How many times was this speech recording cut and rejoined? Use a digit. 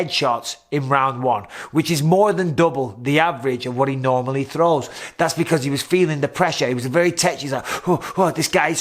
0